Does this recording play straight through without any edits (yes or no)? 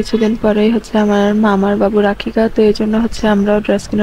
yes